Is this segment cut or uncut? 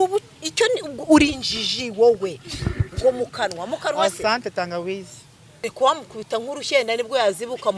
cut